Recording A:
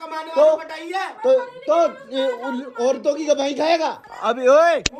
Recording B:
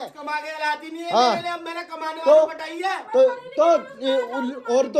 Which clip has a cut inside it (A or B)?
A